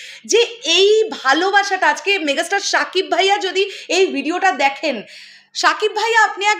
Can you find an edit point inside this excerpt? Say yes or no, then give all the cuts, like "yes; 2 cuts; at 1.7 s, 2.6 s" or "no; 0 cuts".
no; 0 cuts